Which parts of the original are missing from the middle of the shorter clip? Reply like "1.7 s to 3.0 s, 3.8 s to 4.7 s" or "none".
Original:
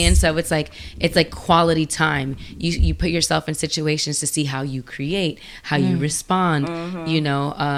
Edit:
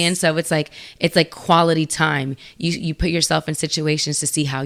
none